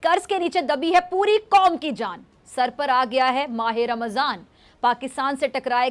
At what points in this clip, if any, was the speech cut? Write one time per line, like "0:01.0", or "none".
none